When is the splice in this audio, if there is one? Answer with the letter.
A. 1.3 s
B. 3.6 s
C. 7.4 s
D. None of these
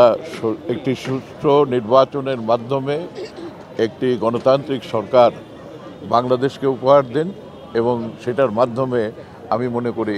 D